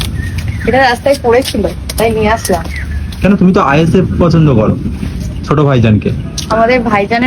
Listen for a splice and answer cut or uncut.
uncut